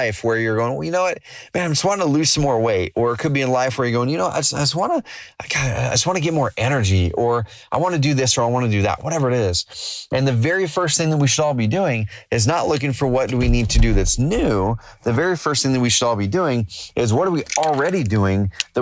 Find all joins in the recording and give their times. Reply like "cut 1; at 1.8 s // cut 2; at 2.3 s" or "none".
none

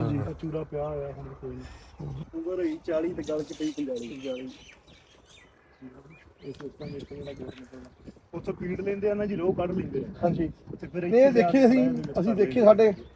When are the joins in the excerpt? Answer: cut 1; at 2.2 s

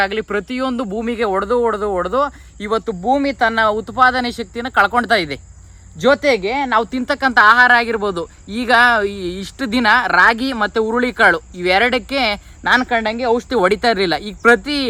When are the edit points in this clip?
none

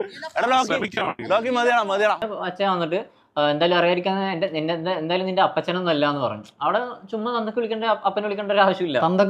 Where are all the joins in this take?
cut 1; at 2.2 s

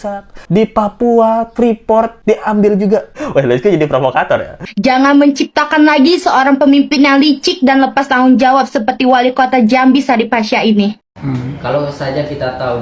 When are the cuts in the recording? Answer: cut 1; at 4.7 s // cut 2; at 11.1 s

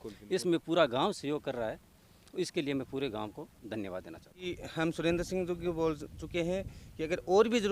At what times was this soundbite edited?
cut 1; at 4.6 s

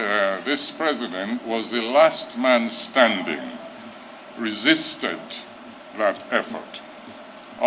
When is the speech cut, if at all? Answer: none

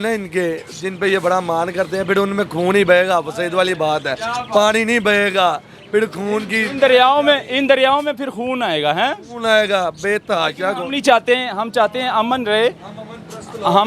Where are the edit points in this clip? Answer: none

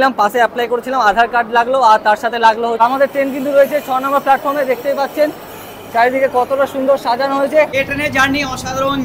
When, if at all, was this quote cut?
cut 1; at 2.8 s // cut 2; at 7.7 s

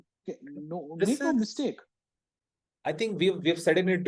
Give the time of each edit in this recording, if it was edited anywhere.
none

